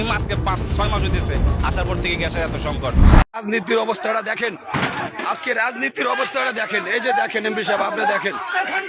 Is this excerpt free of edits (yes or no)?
no